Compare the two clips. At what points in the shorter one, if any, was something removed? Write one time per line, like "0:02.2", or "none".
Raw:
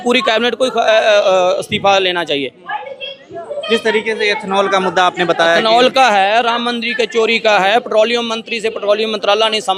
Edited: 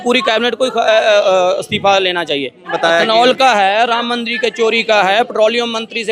0:02.7

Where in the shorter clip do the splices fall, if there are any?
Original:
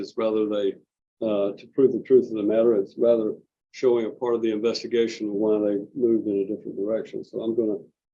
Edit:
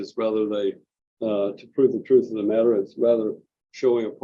none

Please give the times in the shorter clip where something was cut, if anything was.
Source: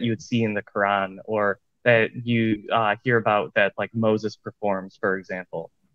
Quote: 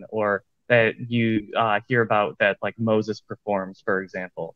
none

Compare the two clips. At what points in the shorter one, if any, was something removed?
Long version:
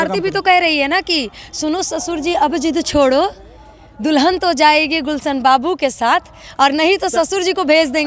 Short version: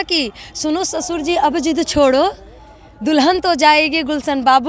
none

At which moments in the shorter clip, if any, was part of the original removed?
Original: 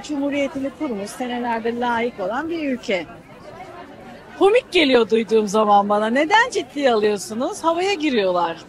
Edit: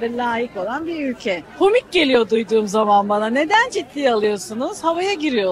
0:01.5

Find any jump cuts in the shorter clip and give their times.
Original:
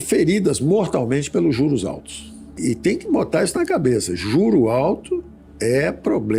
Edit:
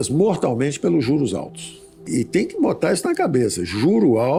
none

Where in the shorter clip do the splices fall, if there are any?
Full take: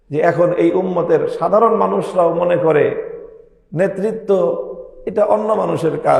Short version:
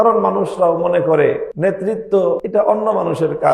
0:01.5
0:02.4

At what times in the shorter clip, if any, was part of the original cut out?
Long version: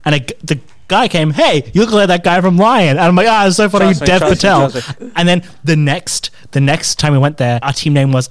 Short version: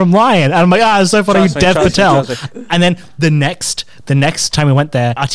none

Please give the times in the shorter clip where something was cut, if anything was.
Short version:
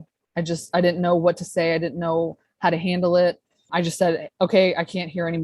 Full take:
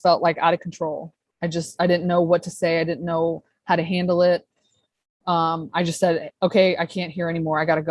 0:03.6

